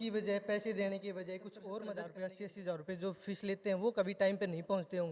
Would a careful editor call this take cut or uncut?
cut